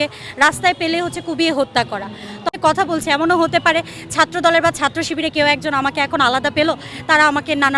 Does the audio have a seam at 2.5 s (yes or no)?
yes